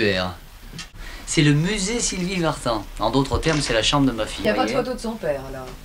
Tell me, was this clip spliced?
yes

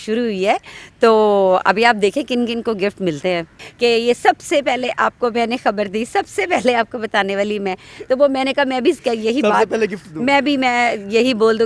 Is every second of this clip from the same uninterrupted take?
no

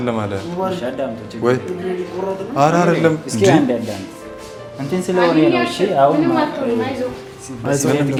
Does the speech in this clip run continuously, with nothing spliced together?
yes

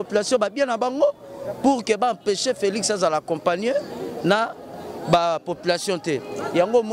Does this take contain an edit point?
no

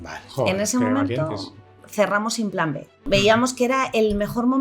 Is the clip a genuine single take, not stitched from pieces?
no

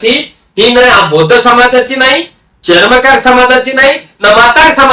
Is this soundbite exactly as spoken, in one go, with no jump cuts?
yes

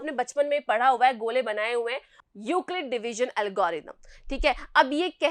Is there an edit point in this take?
yes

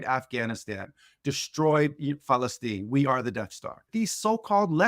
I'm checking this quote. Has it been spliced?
yes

